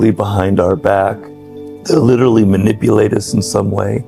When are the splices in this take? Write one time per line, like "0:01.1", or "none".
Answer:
none